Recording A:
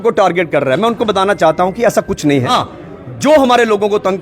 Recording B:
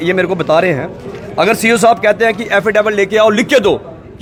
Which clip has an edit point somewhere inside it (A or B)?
A